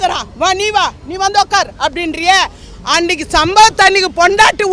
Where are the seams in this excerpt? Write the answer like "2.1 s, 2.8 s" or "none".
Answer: none